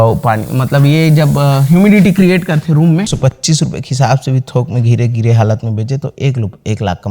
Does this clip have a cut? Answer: yes; 1 cut; at 3.1 s

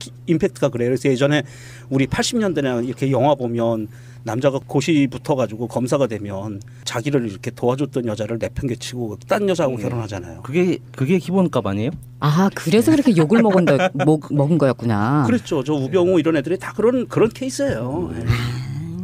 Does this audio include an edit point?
yes; 1 cut; at 3.7 s

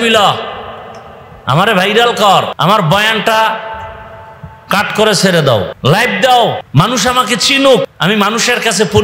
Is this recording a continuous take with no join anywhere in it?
no; 4 cuts; at 2.5 s, 5.7 s, 6.6 s, 7.9 s

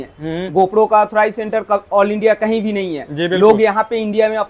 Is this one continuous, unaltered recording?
yes; 0 cuts

